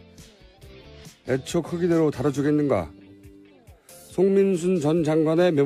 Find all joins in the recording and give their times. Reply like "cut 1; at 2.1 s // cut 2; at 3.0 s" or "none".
none